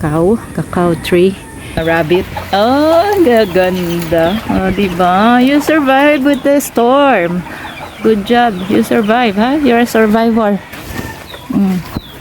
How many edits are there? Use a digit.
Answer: 1